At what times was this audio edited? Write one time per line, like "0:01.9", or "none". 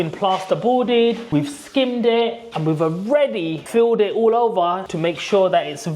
0:01.2